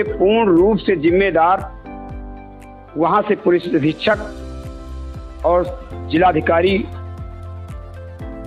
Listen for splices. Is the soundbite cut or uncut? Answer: uncut